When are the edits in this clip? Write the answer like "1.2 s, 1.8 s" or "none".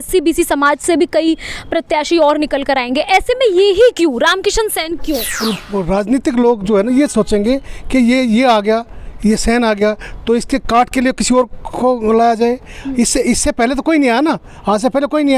5.3 s

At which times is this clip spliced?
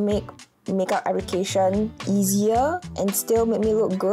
2.0 s, 2.9 s

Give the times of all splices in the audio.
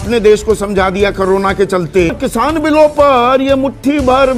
2.2 s

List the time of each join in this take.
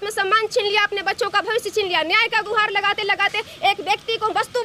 none

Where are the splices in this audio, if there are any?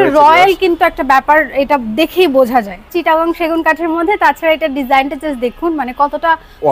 2.9 s

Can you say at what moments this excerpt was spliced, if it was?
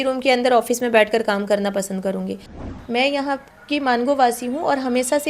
2.6 s

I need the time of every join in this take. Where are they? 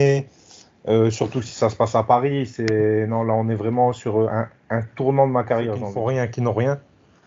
5.9 s

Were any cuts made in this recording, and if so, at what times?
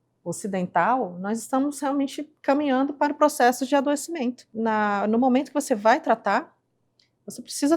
4.4 s

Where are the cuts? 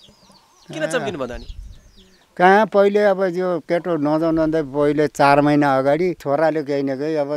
6.2 s

